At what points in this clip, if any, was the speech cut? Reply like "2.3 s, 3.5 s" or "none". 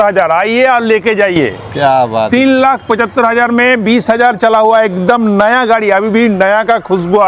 none